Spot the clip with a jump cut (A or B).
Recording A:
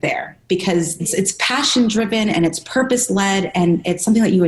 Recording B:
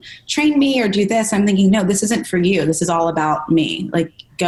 A